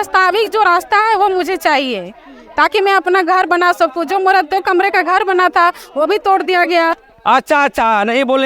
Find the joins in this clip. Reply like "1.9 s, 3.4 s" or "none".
7.0 s